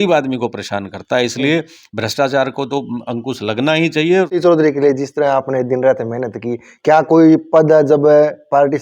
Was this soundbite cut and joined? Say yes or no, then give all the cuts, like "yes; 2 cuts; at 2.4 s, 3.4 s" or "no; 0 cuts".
yes; 1 cut; at 4.3 s